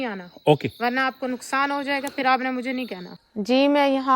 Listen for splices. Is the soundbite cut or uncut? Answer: cut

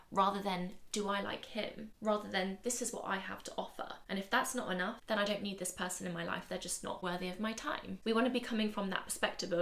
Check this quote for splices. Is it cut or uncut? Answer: cut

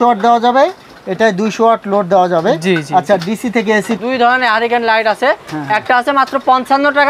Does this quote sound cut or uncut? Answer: cut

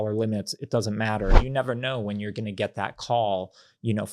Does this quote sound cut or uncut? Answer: cut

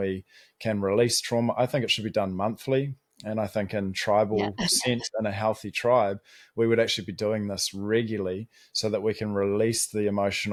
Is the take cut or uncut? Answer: uncut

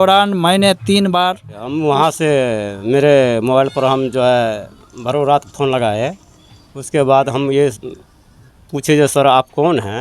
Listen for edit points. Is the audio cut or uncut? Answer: cut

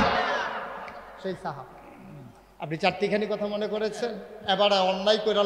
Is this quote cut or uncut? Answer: cut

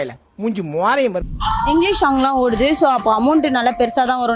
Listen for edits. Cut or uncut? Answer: cut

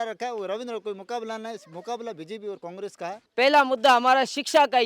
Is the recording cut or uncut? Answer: cut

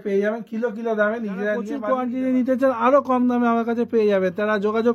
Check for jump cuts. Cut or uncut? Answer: cut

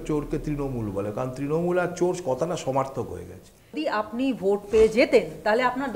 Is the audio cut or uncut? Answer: cut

